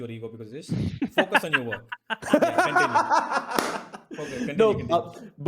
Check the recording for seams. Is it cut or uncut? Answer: uncut